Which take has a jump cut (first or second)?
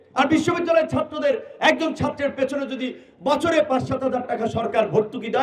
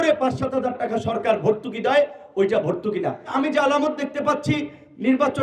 second